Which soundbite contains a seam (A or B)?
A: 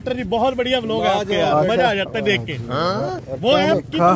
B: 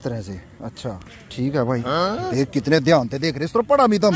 B